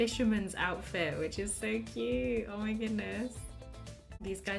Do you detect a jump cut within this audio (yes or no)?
no